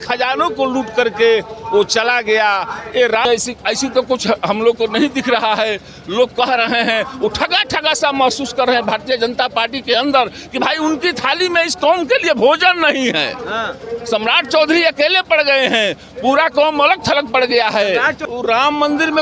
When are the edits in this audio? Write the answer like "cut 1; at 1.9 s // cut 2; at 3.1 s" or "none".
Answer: cut 1; at 3.3 s // cut 2; at 18.2 s